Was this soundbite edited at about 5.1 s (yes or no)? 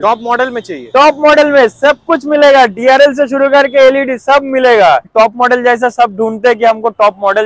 yes